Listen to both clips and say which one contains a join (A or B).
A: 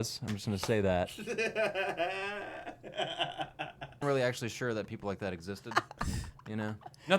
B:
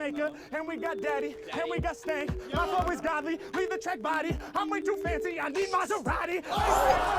A